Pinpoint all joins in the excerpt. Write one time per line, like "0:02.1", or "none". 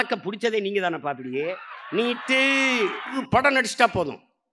0:03.1